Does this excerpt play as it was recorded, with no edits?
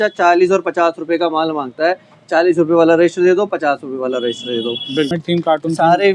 no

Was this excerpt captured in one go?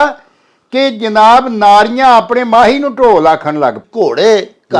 no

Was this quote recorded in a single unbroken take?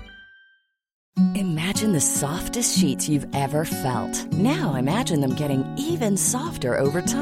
no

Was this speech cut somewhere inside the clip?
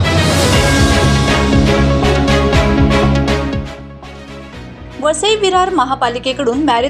no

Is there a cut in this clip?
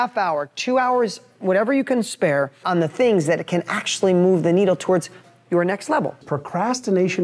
yes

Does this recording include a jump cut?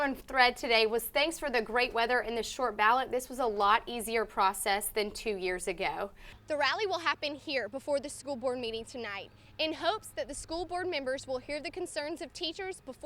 yes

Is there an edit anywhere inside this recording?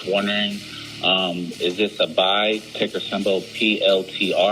yes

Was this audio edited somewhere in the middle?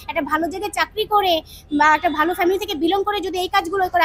no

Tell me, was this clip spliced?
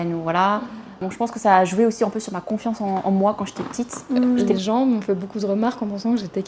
yes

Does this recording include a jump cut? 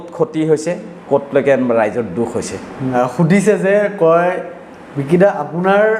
no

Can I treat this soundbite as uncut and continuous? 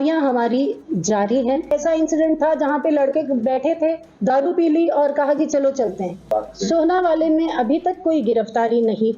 no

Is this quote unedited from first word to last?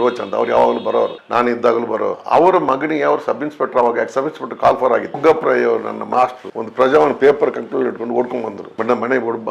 no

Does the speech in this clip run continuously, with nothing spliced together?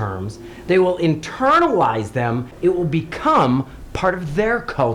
no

